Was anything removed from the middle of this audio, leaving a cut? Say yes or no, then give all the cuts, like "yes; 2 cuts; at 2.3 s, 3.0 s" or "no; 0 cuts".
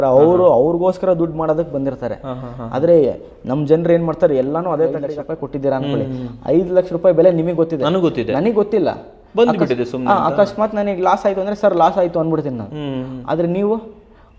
yes; 1 cut; at 5.1 s